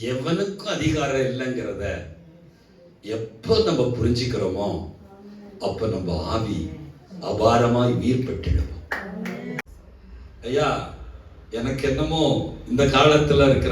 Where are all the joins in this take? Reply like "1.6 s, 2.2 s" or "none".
9.6 s